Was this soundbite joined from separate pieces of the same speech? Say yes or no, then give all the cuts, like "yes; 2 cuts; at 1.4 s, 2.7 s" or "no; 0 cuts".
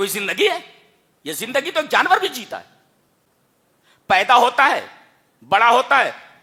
no; 0 cuts